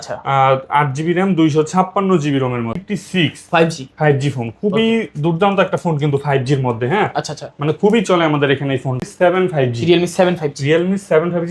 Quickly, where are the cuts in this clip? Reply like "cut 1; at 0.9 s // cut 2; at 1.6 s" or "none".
cut 1; at 2.9 s // cut 2; at 9.0 s